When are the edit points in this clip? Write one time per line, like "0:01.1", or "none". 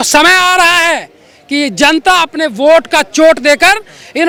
none